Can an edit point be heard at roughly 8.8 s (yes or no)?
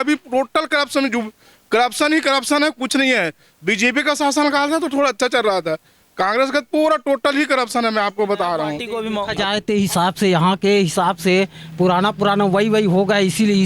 yes